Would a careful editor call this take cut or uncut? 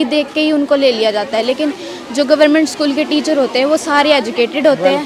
uncut